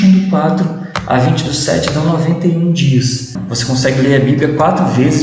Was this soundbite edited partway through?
yes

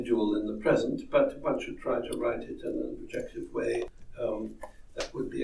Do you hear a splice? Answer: yes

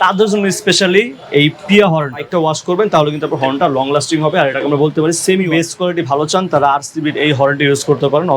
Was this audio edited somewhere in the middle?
yes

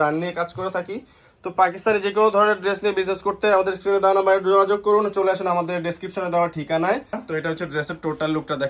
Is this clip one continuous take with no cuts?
no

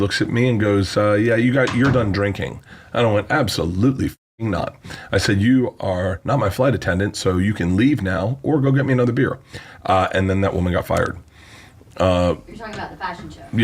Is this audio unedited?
yes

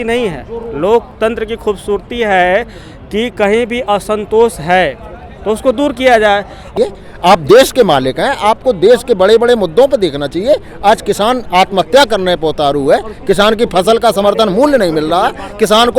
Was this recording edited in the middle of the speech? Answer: yes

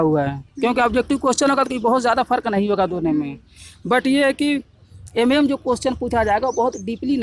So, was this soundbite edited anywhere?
no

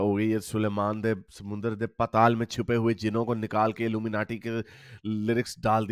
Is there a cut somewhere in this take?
no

